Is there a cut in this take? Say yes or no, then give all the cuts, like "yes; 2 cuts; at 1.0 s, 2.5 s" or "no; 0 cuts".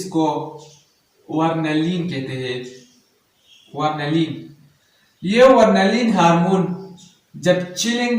no; 0 cuts